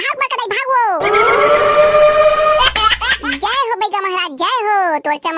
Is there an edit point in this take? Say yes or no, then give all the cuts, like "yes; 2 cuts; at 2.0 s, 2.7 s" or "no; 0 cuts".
yes; 1 cut; at 2.6 s